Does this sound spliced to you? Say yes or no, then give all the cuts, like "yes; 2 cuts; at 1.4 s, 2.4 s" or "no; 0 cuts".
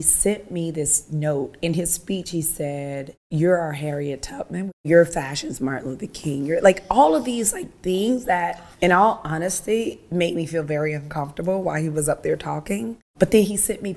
yes; 4 cuts; at 3.3 s, 4.8 s, 8.6 s, 13.1 s